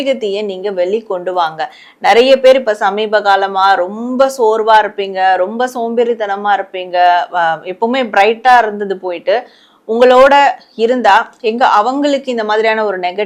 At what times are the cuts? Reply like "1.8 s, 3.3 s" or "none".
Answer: none